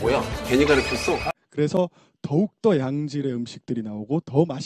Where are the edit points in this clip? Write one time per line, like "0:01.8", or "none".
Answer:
0:01.3